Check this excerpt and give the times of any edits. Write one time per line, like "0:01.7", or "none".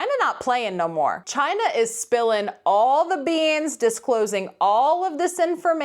0:01.2